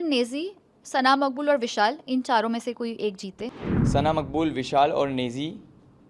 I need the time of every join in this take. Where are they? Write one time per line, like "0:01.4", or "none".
0:03.4

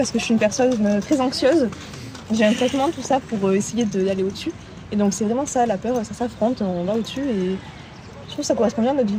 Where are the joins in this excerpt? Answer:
none

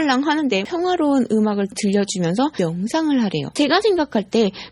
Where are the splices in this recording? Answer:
none

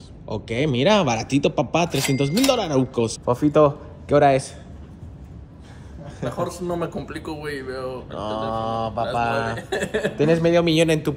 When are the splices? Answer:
0:03.1

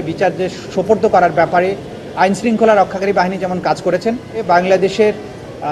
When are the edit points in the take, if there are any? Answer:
0:04.4

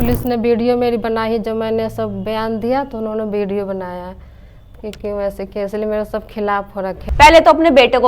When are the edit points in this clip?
0:07.0

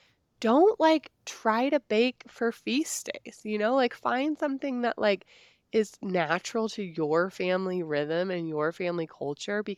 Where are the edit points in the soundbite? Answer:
none

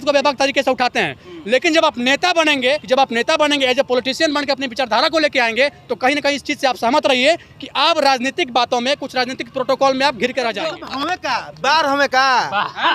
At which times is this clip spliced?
0:02.8
0:11.0

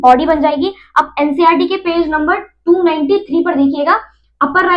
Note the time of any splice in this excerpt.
none

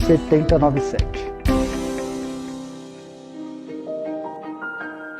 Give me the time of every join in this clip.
0:03.3

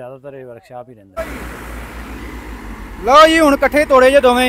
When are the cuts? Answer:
0:01.1

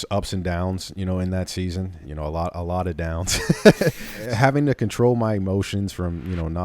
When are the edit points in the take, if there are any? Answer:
0:02.0
0:04.2

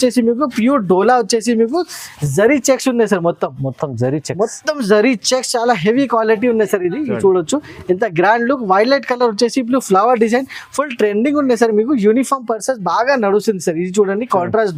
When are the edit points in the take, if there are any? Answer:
none

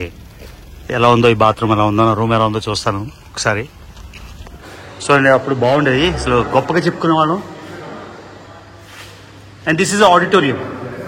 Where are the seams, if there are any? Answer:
0:04.6

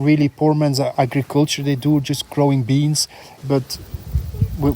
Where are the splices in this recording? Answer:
0:00.9
0:03.3

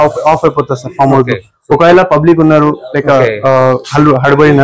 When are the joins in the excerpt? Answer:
none

